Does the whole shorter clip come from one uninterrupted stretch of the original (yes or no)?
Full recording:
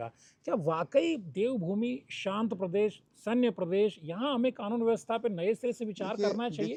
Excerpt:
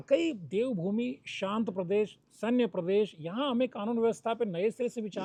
yes